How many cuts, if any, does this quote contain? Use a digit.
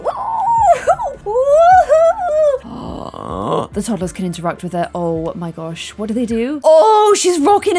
1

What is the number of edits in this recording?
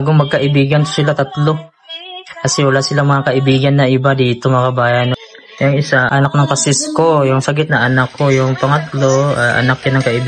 2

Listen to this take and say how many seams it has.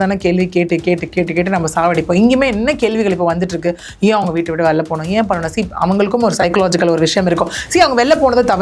0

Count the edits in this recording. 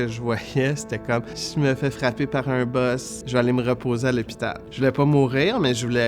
3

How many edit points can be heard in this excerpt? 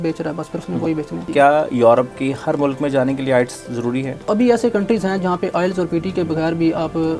2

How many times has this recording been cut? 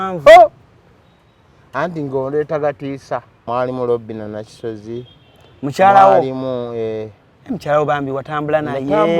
1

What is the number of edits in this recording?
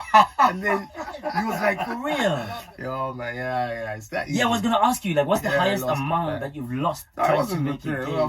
1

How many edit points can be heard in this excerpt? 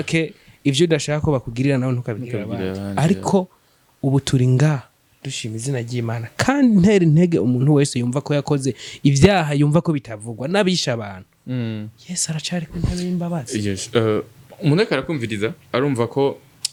0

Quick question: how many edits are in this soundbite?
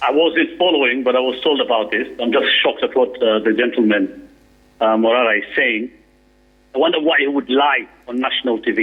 0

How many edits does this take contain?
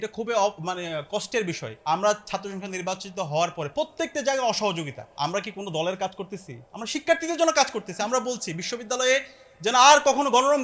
0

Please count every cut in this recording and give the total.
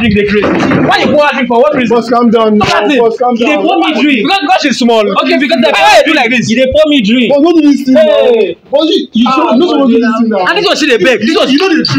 0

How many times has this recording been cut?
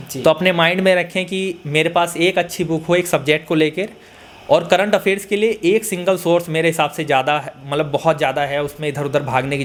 0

